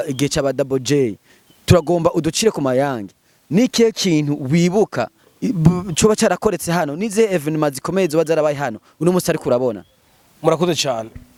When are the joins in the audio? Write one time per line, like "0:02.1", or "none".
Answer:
none